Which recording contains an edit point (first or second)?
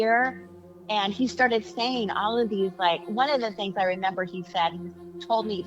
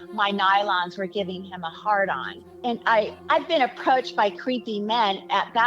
second